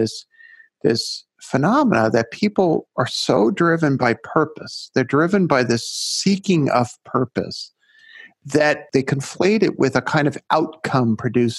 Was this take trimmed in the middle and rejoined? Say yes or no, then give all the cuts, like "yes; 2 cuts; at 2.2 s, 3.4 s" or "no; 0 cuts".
yes; 1 cut; at 8.8 s